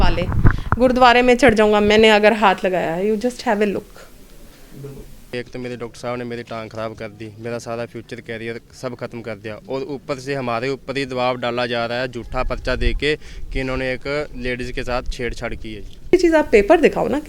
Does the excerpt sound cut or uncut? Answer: cut